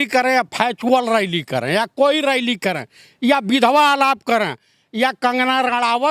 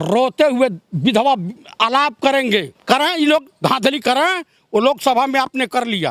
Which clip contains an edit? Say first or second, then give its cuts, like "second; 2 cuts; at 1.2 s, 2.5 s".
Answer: second; 1 cut; at 2.7 s